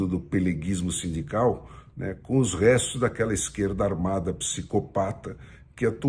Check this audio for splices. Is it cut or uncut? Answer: uncut